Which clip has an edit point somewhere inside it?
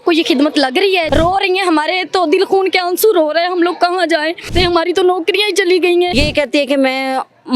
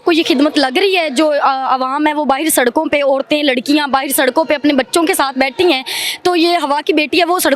first; 3 cuts; at 1.1 s, 4.5 s, 6.1 s

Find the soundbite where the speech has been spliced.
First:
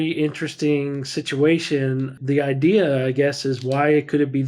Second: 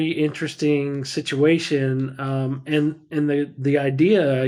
first; 1 cut; at 2.2 s

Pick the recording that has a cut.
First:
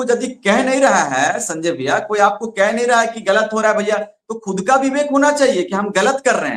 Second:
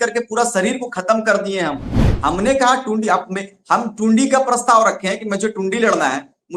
second; 1 cut; at 2.1 s

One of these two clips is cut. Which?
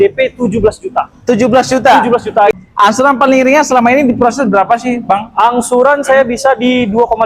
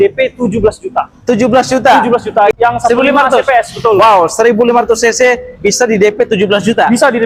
first; 1 cut; at 2.6 s

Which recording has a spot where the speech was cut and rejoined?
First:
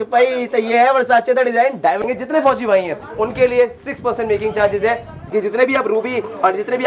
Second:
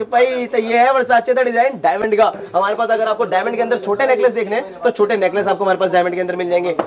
first; 2 cuts; at 2.0 s, 5.1 s

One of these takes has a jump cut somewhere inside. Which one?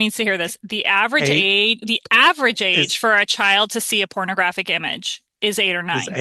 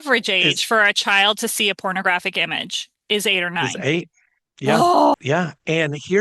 second; 1 cut; at 5.1 s

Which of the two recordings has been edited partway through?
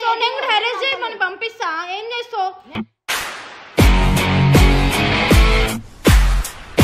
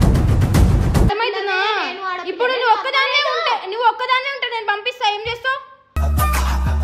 second; 1 cut; at 1.1 s

